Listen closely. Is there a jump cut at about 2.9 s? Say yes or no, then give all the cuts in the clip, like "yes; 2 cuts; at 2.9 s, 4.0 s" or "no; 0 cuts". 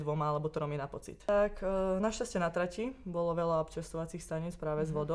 no; 1 cut; at 1.3 s